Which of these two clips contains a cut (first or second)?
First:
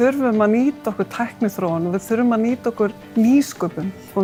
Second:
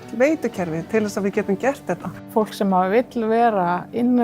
second